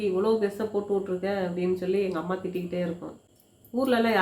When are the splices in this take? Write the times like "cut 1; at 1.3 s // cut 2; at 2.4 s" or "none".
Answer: cut 1; at 3.2 s